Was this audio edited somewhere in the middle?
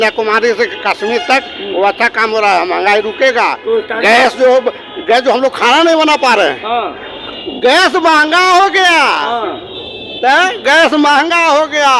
no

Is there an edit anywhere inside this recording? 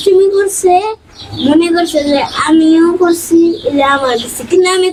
no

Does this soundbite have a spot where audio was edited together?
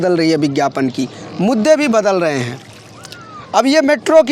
no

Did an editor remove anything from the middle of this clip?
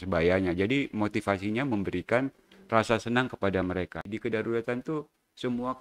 yes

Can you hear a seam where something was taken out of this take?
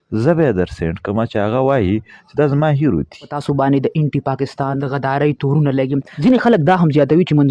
yes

